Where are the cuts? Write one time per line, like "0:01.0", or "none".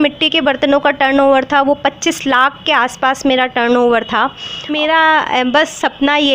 0:04.8

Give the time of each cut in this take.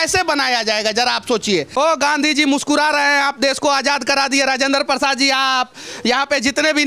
0:01.7

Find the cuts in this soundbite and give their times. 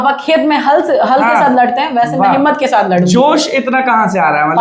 none

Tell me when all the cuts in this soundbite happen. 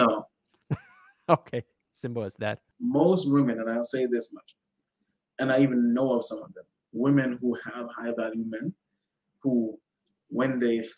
0:02.6

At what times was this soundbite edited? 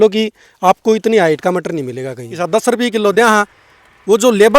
0:02.4

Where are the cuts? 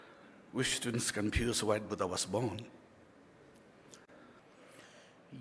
0:04.4

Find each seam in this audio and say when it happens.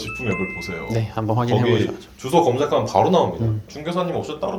0:03.7

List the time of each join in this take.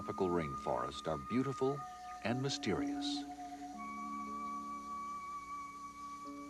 none

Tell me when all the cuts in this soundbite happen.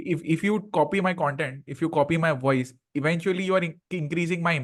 none

